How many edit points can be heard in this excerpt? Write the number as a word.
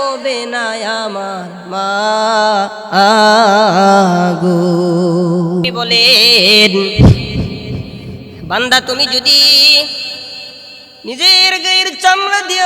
one